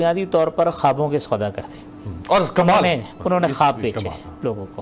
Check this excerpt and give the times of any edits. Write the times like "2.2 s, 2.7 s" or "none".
none